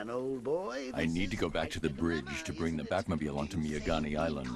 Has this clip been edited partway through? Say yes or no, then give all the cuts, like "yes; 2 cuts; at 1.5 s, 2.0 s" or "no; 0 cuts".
yes; 1 cut; at 0.9 s